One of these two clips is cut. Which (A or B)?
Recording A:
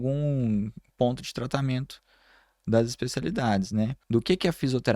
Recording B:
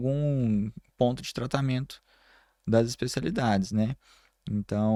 A